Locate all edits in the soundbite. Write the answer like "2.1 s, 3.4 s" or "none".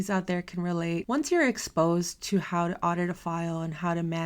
1.0 s